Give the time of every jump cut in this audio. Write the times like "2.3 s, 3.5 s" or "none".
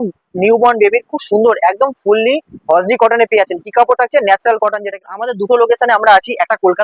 5.0 s